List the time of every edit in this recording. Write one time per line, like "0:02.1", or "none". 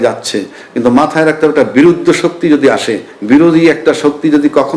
none